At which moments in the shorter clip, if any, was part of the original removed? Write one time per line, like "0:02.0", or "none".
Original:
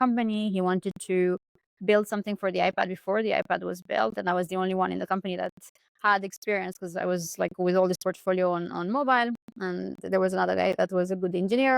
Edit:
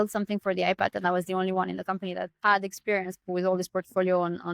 0:00.9
0:02.3
0:03.2